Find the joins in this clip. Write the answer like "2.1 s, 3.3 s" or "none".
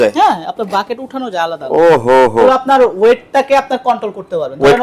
2.4 s